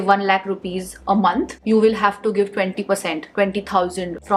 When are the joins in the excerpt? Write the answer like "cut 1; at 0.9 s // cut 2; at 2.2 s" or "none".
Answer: none